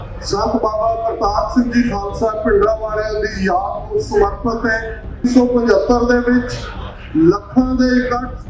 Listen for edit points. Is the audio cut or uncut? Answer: cut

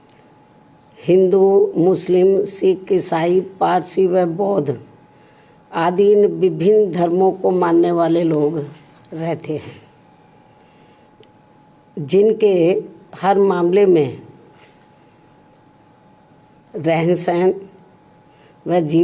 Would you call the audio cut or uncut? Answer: uncut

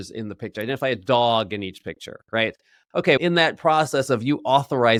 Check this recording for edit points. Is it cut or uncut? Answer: uncut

